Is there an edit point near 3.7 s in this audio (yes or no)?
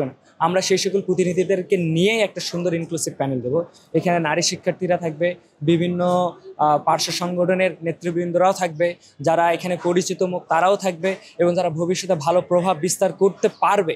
no